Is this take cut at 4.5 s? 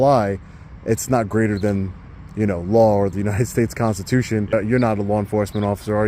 yes; 1 cut; at 4.5 s

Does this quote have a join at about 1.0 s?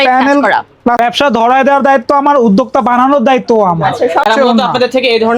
yes; 2 cuts; at 1.0 s, 4.3 s

